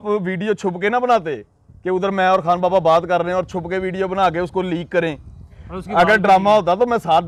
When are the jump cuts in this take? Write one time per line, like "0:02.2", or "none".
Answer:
none